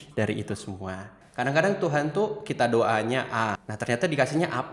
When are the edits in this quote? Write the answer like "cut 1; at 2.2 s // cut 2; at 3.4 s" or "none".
cut 1; at 1.2 s // cut 2; at 3.7 s